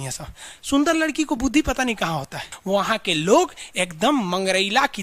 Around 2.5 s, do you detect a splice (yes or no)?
yes